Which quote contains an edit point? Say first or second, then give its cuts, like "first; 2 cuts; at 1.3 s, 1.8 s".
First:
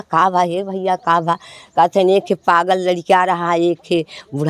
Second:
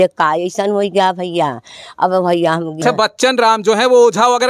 second; 1 cut; at 2.8 s